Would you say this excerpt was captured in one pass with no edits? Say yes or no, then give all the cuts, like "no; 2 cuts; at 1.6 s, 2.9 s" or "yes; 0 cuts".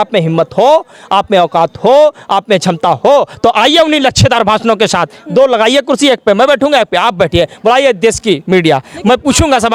yes; 0 cuts